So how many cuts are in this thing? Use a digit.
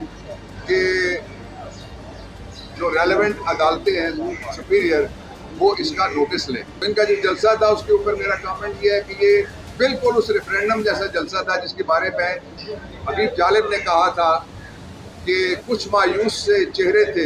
1